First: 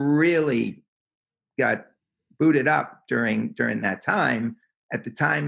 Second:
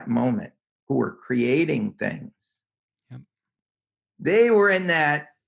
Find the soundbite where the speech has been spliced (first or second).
second